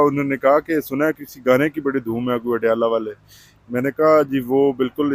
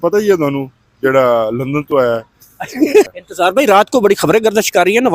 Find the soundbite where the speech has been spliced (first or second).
second